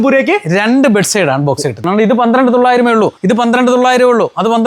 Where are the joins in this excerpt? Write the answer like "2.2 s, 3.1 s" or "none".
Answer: 1.8 s, 3.2 s